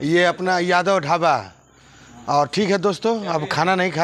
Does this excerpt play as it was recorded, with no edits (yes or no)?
yes